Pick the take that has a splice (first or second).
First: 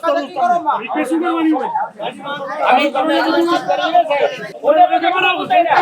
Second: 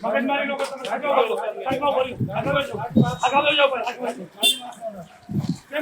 first